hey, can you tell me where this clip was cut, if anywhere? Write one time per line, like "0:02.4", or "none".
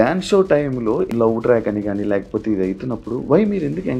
0:01.1